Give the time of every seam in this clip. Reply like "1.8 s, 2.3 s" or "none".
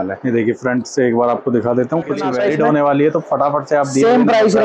2.3 s